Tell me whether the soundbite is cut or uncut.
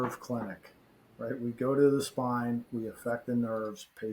uncut